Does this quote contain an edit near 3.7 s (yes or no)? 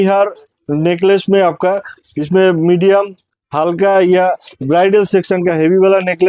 no